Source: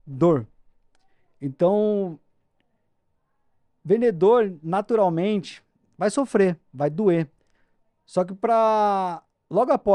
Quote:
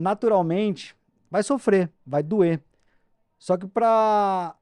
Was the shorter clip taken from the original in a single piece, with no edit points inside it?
yes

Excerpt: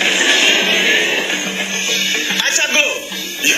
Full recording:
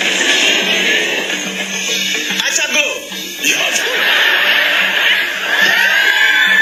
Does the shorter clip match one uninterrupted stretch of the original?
yes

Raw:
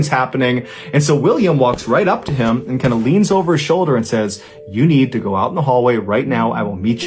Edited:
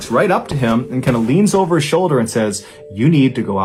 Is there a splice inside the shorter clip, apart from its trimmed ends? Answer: no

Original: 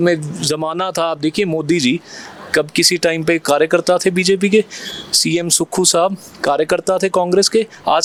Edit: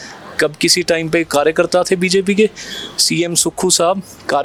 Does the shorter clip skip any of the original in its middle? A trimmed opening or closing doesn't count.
no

